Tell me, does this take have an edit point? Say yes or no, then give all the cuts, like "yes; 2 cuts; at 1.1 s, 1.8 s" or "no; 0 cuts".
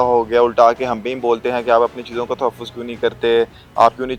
no; 0 cuts